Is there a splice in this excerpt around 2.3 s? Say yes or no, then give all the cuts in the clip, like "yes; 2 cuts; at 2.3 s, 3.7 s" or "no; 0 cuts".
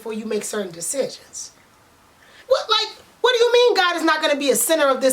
yes; 1 cut; at 2.3 s